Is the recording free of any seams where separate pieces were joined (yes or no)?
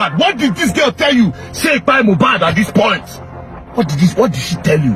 yes